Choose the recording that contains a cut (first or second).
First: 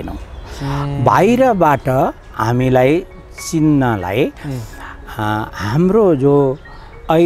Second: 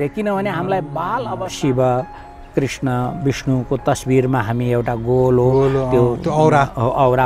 second